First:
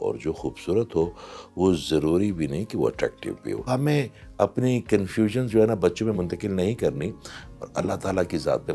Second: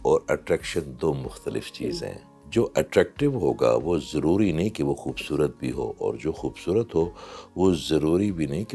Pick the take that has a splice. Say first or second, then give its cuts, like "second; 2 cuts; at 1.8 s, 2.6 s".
first; 1 cut; at 3.7 s